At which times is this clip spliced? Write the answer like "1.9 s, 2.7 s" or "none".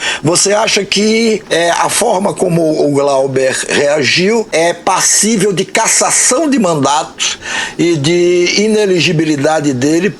1.4 s, 4.5 s